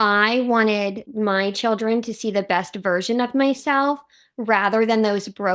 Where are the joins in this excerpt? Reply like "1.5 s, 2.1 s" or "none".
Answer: 1.0 s